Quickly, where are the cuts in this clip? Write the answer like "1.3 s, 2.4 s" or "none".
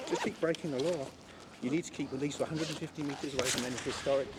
none

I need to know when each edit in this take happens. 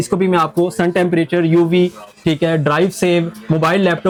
none

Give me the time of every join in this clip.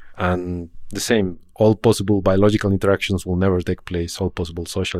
1.2 s

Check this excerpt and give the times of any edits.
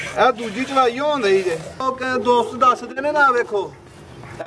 1.8 s

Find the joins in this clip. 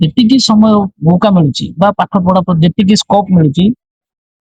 none

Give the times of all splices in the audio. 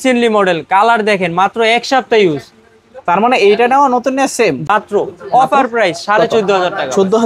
4.7 s

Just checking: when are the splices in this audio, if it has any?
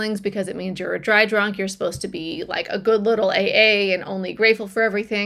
none

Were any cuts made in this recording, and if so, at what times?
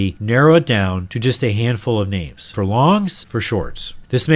1.1 s, 2.5 s, 3.2 s

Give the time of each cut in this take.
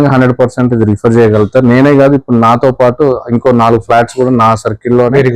none

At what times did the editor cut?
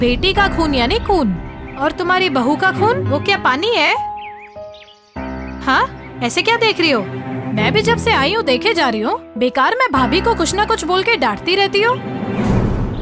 none

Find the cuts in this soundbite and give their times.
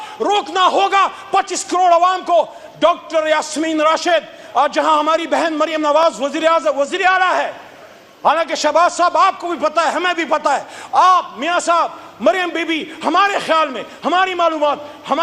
none

